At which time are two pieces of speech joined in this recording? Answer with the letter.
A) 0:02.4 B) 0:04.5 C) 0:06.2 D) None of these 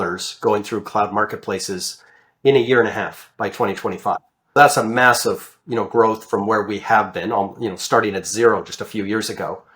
B